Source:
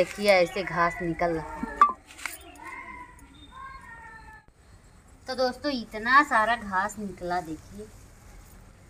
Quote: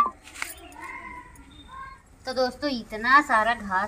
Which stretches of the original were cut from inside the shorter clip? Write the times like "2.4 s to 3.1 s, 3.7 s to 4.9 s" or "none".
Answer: 3.8 s to 5.0 s